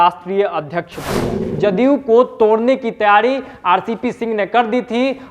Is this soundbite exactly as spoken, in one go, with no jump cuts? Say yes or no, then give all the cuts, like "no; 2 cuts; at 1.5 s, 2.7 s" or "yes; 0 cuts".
no; 1 cut; at 1.4 s